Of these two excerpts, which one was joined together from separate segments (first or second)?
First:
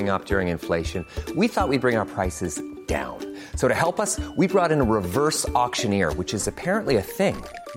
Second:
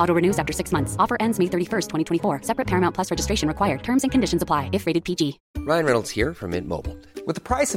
second